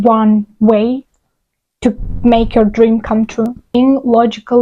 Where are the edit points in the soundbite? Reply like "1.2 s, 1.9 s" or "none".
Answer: 3.7 s